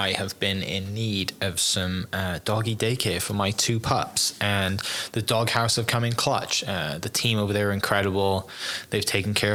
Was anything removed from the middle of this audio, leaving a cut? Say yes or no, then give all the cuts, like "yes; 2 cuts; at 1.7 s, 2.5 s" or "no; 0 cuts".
no; 0 cuts